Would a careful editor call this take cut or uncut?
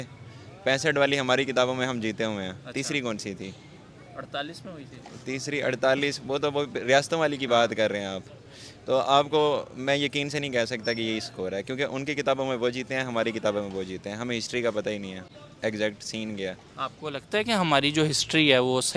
uncut